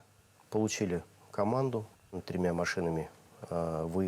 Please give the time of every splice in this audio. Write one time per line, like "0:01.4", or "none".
0:02.2